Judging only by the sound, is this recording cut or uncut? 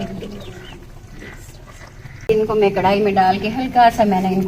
cut